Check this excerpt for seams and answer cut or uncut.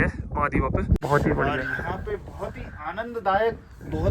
cut